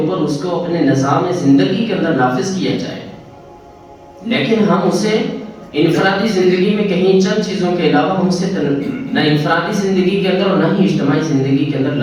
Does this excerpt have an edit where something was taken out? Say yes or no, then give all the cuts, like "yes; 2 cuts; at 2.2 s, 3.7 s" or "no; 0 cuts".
no; 0 cuts